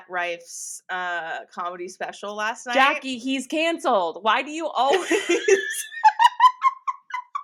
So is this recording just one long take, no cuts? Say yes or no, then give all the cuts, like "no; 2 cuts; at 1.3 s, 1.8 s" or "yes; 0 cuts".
yes; 0 cuts